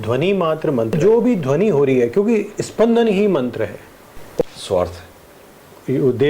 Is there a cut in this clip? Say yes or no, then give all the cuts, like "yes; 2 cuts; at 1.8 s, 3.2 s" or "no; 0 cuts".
yes; 2 cuts; at 1.0 s, 4.4 s